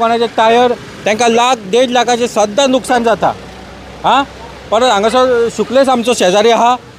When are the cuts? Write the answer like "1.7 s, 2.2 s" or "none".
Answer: none

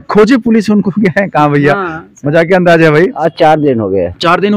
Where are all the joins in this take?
3.2 s

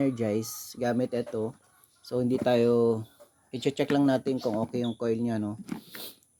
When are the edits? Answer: none

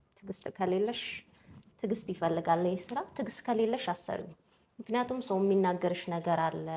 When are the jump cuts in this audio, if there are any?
none

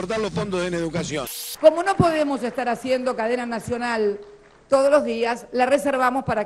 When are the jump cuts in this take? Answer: 1.5 s

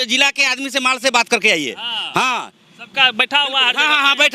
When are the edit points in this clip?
none

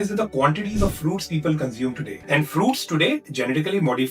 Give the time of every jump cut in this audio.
2.1 s

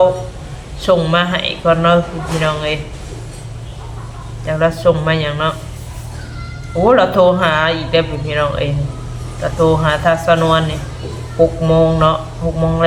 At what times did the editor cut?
none

